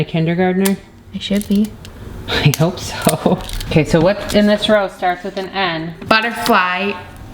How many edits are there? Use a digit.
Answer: 2